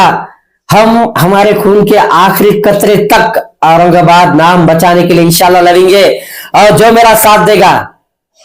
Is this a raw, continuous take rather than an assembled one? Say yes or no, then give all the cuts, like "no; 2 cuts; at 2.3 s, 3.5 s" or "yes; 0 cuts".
yes; 0 cuts